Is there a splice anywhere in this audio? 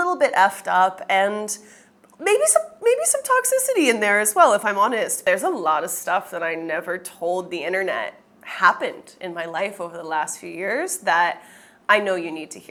no; 0 cuts

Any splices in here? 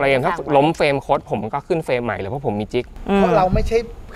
yes; 1 cut; at 2.9 s

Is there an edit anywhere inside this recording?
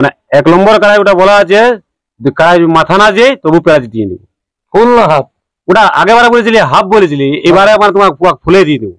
no; 0 cuts

